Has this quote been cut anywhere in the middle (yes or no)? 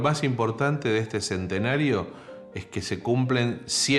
no